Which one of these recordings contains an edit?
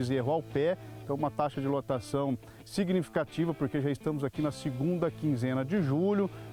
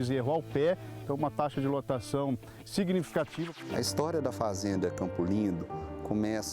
second; 1 cut; at 3.5 s

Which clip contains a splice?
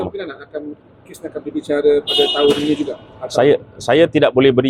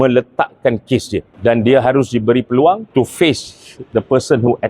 second; 2 cuts; at 1.3 s, 2.8 s

